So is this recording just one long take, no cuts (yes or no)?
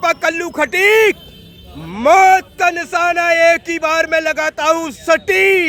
yes